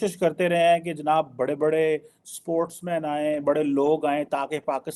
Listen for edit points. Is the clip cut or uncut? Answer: uncut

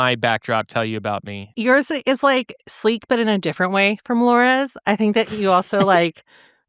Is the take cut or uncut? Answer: cut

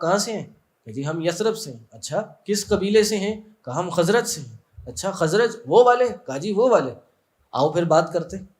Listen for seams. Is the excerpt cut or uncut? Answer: uncut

